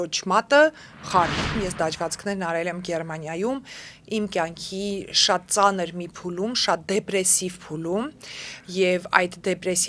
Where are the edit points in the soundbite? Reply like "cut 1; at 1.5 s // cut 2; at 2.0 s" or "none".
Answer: cut 1; at 1.5 s